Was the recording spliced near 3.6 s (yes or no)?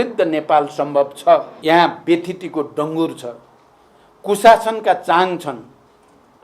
no